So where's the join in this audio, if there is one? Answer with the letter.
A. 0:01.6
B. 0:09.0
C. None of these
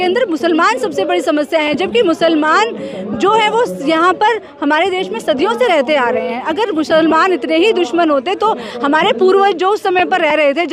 C